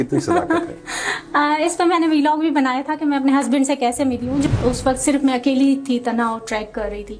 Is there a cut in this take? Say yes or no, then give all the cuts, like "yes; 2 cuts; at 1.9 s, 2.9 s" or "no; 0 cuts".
yes; 1 cut; at 4.5 s